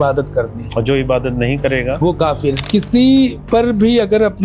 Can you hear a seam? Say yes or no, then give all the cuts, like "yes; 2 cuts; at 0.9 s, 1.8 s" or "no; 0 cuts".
yes; 2 cuts; at 2.6 s, 3.4 s